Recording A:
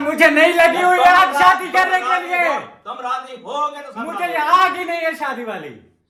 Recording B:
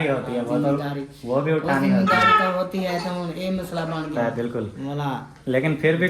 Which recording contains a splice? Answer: B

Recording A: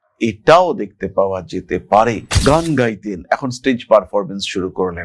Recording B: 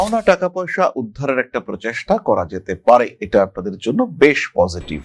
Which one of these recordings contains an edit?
A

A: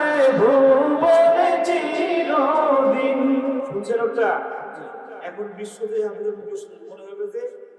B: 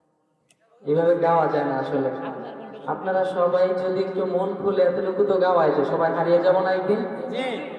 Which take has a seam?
A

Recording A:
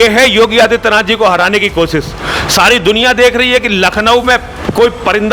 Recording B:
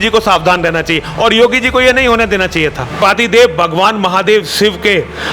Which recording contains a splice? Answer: B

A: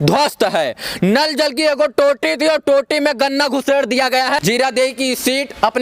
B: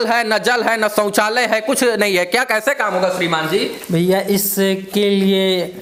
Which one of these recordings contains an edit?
A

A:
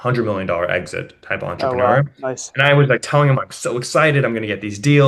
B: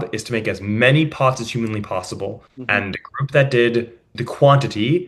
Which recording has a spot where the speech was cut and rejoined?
B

